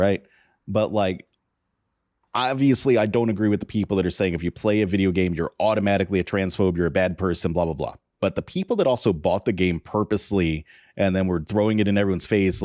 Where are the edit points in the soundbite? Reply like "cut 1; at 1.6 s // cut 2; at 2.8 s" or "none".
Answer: cut 1; at 8.0 s